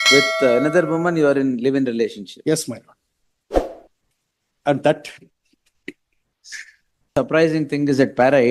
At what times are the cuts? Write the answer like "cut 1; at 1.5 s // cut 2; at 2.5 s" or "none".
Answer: cut 1; at 7.1 s